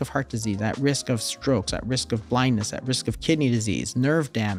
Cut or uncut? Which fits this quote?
uncut